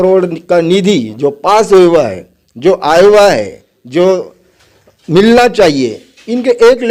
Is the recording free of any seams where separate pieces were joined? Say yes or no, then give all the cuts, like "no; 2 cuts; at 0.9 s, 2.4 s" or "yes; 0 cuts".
yes; 0 cuts